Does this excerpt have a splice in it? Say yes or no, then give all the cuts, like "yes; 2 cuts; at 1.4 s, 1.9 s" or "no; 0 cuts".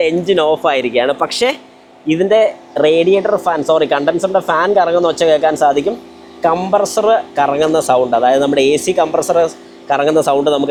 no; 0 cuts